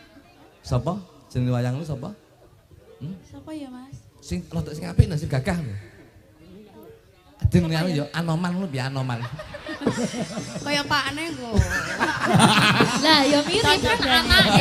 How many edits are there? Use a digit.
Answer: 0